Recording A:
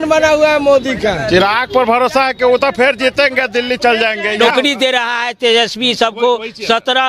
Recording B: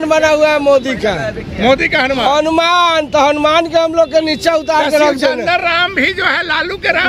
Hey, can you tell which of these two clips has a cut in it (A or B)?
A